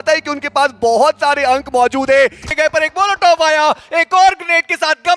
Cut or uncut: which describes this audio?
cut